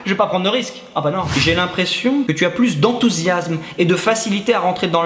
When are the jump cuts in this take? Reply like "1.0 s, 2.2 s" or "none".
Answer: 1.3 s, 2.2 s